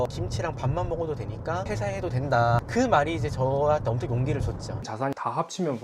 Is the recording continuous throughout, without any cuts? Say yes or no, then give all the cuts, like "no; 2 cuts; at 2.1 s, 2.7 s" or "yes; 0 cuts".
no; 1 cut; at 4.8 s